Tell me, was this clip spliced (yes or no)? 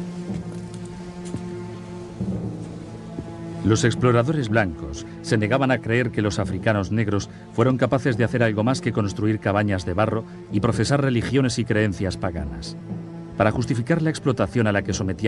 no